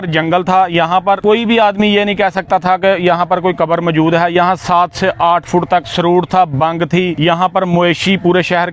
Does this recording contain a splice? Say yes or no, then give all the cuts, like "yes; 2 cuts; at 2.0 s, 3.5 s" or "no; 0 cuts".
yes; 3 cuts; at 1.2 s, 5.9 s, 7.1 s